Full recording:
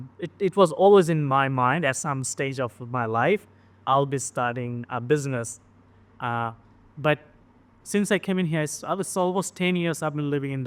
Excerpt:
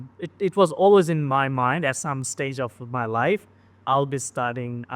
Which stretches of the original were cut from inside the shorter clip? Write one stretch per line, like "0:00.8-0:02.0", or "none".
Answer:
none

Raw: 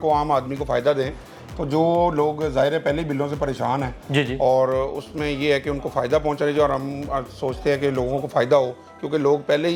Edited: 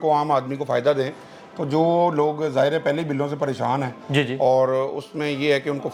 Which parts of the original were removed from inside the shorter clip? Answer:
none

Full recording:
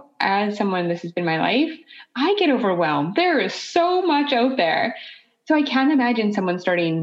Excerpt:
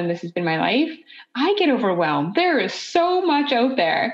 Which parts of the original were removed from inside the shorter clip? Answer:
none

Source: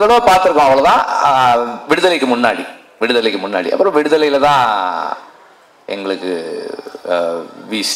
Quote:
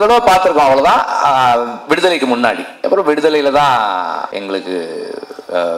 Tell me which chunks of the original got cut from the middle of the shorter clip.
0:02.8-0:03.7
0:05.2-0:05.8

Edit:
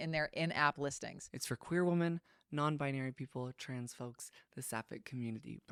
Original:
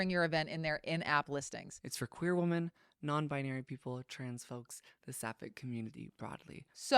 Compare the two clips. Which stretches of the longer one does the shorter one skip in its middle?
none

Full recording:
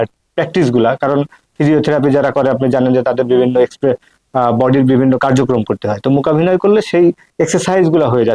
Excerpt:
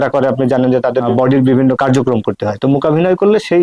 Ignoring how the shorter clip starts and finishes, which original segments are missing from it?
0:03.3-0:04.5

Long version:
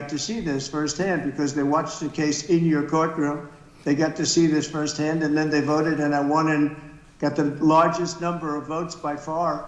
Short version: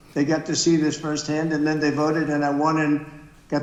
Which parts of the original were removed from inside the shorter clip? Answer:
none

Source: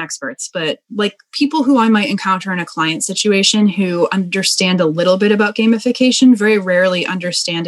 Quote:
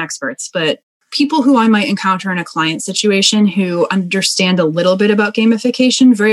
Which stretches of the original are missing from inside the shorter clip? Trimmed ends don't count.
0:00.9-0:01.1

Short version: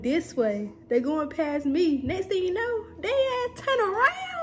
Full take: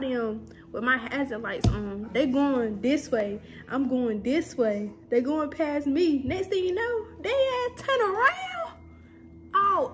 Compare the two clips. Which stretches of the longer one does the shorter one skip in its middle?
none

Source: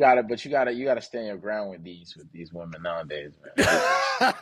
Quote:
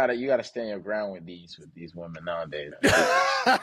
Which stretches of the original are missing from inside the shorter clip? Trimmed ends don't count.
0:03.3-0:03.5

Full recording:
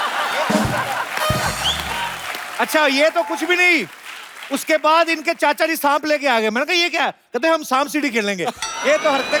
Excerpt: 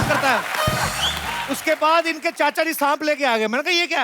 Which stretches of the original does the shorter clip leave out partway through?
0:02.0-0:04.4

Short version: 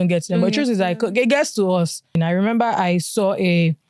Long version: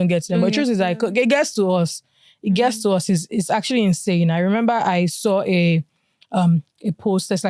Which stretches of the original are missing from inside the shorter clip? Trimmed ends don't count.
0:02.2-0:04.2

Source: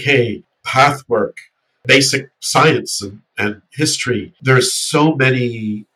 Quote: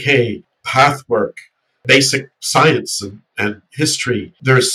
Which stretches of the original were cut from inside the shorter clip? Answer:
none

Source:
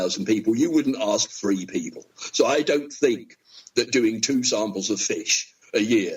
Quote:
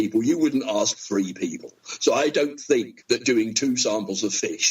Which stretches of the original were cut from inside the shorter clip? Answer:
0:03.3-0:03.6

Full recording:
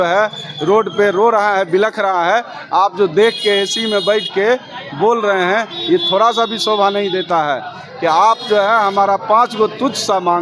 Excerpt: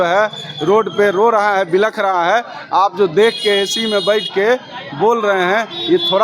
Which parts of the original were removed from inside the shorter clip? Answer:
none

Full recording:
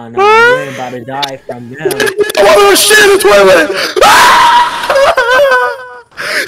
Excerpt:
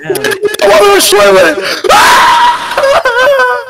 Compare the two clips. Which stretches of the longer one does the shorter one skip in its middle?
0:02.8-0:03.2

